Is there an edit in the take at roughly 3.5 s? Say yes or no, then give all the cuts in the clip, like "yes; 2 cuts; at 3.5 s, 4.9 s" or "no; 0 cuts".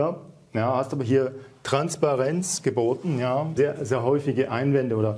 yes; 1 cut; at 3.5 s